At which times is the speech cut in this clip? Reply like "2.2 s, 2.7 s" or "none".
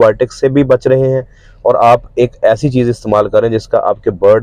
none